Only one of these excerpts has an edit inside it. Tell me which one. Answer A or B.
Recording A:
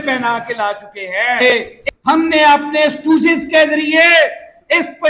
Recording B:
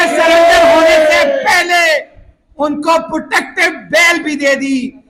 A